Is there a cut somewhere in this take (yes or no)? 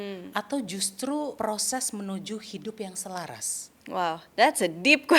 yes